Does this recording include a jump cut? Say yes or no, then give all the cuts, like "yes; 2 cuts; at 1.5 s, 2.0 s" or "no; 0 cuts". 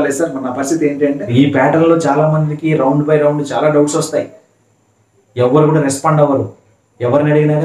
yes; 1 cut; at 1.2 s